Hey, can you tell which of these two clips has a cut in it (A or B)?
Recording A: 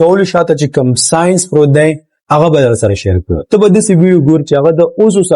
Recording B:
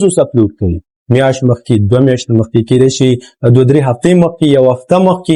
A